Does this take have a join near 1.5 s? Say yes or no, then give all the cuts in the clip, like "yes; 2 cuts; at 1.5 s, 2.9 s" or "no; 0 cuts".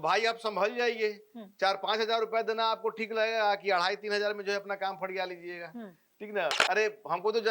no; 1 cut; at 6.6 s